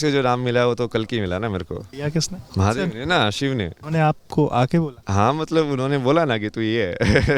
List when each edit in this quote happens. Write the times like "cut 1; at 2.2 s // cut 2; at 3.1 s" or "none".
cut 1; at 2.2 s // cut 2; at 5.0 s

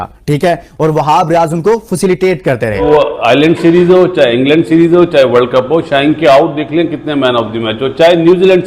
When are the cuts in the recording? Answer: cut 1; at 2.7 s

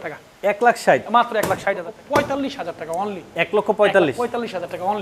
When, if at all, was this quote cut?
cut 1; at 1.6 s

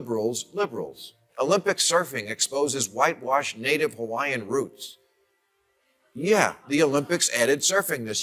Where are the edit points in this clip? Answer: cut 1; at 1.2 s

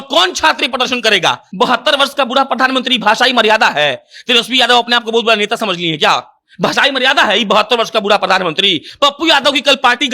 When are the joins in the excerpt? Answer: cut 1; at 1.5 s // cut 2; at 8.8 s

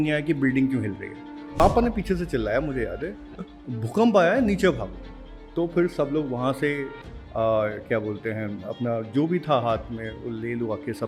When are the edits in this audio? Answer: cut 1; at 1.5 s

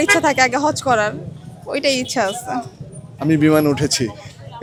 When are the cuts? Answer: none

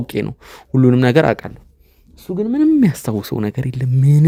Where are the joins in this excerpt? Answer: none

